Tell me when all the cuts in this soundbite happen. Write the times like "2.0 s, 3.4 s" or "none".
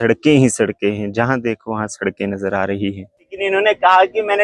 3.4 s